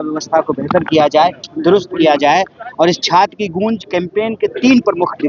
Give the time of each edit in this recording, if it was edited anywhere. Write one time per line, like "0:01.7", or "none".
none

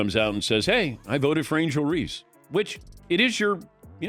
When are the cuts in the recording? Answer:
none

